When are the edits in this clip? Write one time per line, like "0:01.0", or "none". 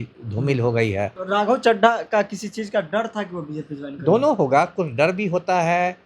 0:01.2